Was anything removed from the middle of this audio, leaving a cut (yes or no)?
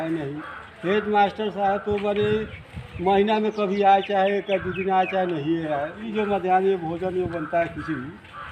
yes